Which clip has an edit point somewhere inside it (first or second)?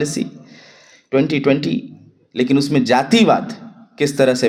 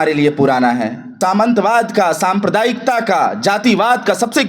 second